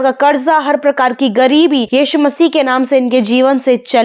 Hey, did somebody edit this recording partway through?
no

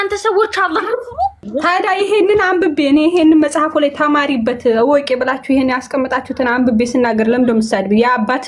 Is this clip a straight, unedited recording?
no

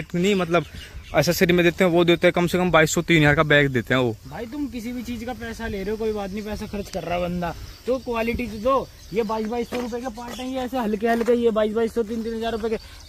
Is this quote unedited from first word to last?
yes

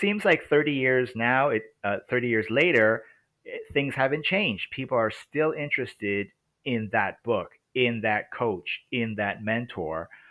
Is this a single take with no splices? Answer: yes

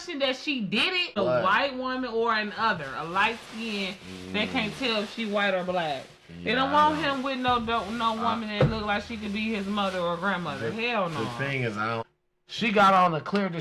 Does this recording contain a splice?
yes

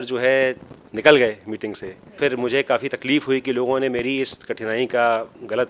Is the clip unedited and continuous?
no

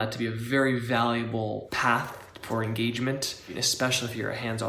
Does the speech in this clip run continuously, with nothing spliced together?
no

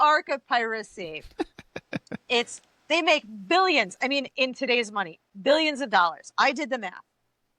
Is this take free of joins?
yes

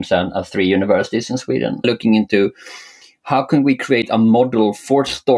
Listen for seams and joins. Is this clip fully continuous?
no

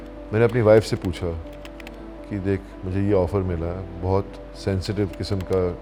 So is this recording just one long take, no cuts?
yes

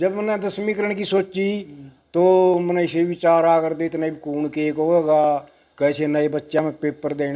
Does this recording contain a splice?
no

